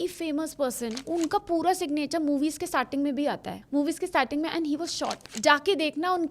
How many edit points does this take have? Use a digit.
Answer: 3